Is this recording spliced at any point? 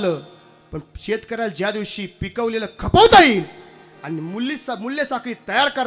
no; 0 cuts

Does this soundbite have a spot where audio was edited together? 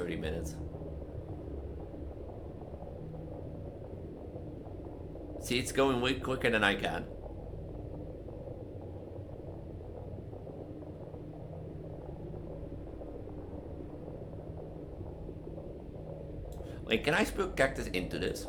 no; 0 cuts

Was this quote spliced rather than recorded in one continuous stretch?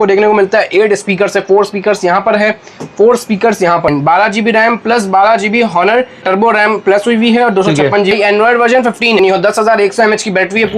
yes; 4 cuts; at 3.9 s, 6.2 s, 8.1 s, 9.2 s

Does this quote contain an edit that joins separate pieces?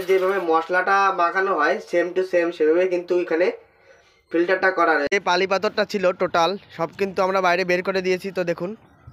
yes; 1 cut; at 5.1 s

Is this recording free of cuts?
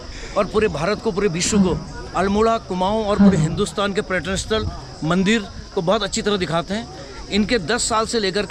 yes; 0 cuts

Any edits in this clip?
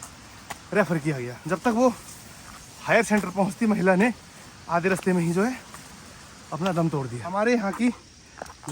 yes; 2 cuts; at 1.4 s, 7.3 s

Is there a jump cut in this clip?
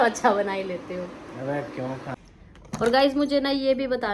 yes; 1 cut; at 2.1 s

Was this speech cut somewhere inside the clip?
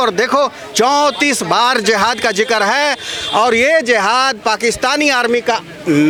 no; 0 cuts

